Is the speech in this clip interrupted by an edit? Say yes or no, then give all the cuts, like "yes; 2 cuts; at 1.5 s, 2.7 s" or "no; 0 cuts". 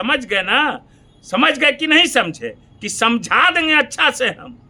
no; 0 cuts